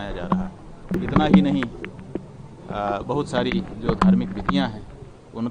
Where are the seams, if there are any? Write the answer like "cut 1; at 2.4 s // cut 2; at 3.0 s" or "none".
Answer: cut 1; at 0.9 s